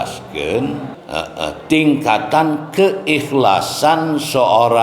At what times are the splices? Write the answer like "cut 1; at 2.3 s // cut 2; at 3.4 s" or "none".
cut 1; at 0.9 s